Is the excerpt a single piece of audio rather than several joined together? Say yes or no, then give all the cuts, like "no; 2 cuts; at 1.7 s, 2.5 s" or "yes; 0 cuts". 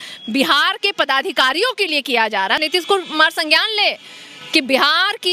no; 1 cut; at 2.6 s